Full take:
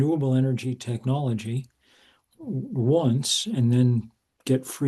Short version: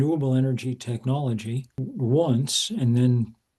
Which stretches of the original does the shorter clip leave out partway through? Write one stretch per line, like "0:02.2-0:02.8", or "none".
0:01.8-0:02.6